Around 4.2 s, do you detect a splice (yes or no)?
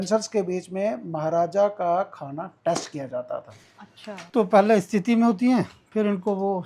yes